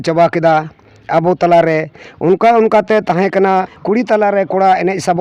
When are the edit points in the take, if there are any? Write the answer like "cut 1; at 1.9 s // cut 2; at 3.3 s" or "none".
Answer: cut 1; at 3.8 s